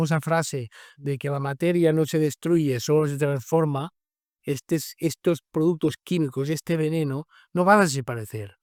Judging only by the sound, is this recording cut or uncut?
uncut